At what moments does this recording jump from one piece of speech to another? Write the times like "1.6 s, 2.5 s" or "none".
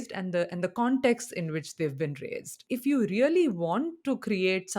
2.6 s